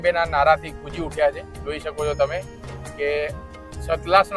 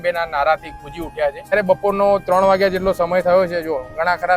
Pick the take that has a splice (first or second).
second